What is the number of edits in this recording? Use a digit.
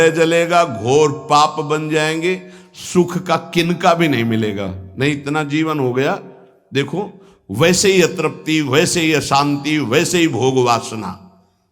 0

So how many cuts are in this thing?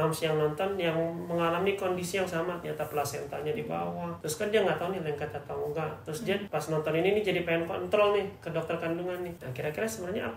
3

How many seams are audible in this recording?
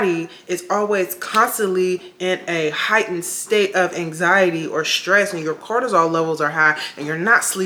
0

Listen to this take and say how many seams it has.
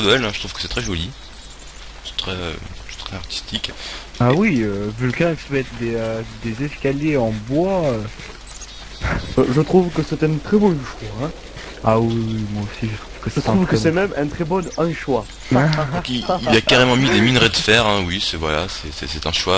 1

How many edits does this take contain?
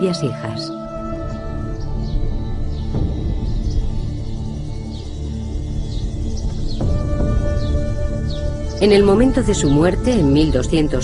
0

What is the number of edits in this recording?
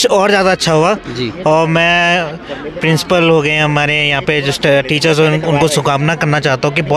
0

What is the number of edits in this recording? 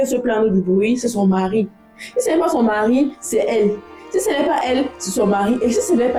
0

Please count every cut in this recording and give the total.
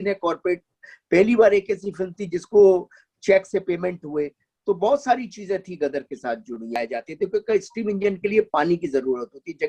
1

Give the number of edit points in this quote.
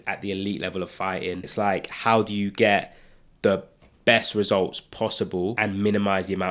2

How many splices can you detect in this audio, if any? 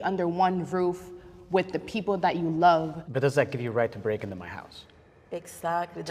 1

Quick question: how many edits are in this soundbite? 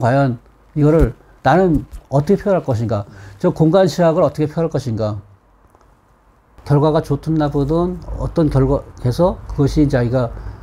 1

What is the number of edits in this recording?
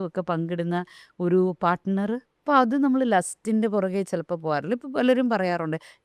1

